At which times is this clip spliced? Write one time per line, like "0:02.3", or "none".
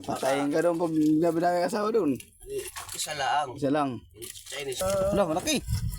0:04.8